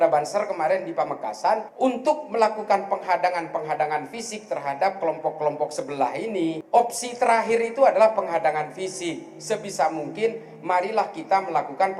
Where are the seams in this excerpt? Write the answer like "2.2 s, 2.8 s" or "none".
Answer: 1.7 s, 6.6 s